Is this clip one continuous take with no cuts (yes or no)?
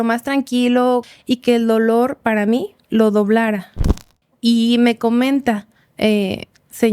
no